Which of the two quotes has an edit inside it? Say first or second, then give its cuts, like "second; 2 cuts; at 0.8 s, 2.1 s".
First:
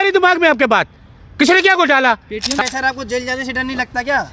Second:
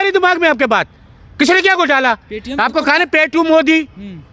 first; 1 cut; at 2.6 s